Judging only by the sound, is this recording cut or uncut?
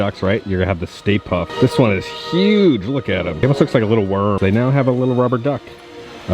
uncut